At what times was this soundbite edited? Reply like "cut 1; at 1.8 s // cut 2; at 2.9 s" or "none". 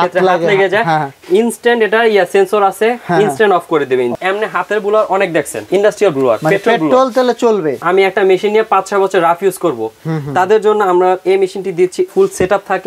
cut 1; at 4.1 s // cut 2; at 7.8 s // cut 3; at 12.1 s